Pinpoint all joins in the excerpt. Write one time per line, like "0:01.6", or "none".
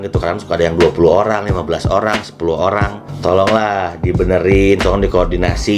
0:03.0